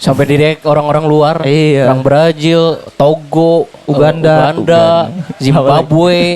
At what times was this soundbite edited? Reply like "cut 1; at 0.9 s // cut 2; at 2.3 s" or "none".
none